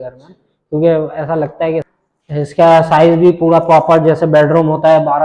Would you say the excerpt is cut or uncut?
cut